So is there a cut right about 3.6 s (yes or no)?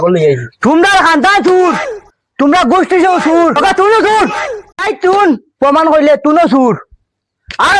yes